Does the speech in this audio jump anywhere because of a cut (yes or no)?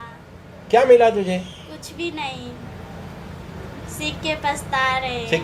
no